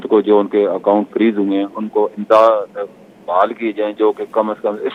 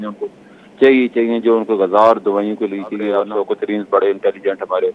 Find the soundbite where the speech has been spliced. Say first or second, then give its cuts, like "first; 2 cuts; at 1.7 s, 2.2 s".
second; 1 cut; at 3.2 s